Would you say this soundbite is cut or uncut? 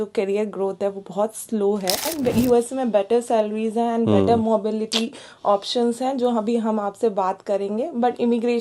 cut